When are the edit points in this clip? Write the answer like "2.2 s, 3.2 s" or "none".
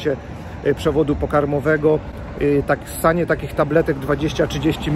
none

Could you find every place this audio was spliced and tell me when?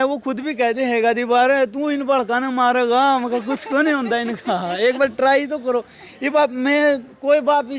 none

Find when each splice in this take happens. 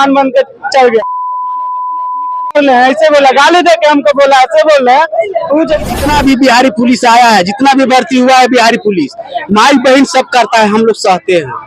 6.0 s

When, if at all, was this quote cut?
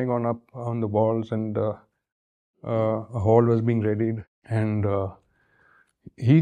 4.3 s

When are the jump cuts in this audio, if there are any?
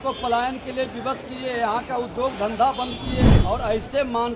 3.3 s

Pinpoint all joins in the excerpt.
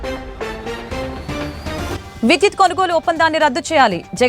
1.8 s

